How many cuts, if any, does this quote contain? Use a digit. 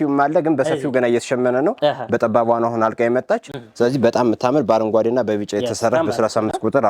0